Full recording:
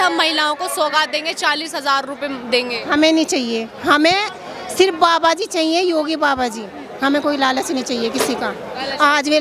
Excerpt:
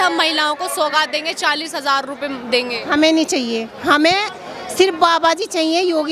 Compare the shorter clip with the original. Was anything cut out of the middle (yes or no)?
no